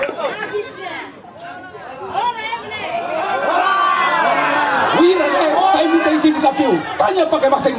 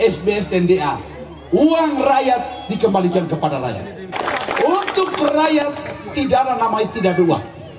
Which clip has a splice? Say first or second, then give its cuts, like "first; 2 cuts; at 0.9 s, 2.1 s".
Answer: second; 1 cut; at 4.1 s